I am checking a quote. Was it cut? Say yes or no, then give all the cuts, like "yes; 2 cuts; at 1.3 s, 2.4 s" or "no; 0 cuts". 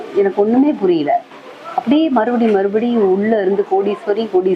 no; 0 cuts